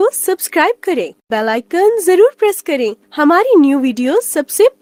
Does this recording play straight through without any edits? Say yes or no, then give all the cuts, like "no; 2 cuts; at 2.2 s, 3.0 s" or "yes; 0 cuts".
yes; 0 cuts